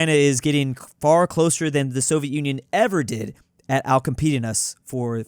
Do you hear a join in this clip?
no; 0 cuts

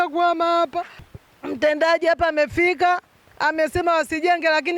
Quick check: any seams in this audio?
yes; 1 cut; at 1.3 s

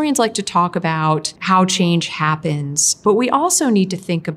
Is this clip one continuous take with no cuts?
no; 1 cut; at 1.3 s

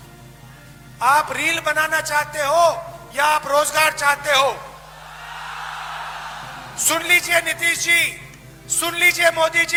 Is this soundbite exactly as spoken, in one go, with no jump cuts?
yes; 0 cuts

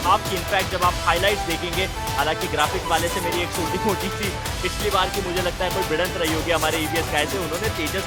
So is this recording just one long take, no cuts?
yes; 0 cuts

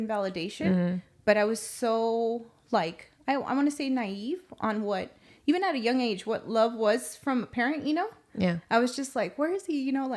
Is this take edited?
no; 0 cuts

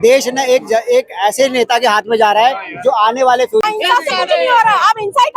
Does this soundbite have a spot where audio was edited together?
yes; 1 cut; at 3.7 s

